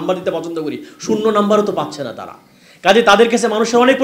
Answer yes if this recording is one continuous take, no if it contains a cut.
yes